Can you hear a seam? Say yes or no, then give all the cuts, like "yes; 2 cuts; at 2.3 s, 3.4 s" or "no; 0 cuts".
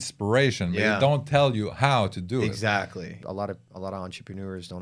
yes; 1 cut; at 3.2 s